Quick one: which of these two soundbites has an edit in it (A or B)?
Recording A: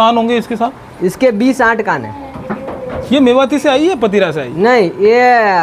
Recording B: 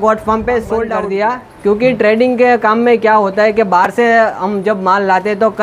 B